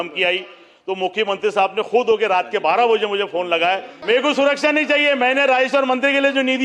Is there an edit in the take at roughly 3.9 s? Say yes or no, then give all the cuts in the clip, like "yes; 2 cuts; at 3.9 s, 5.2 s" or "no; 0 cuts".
yes; 1 cut; at 3.9 s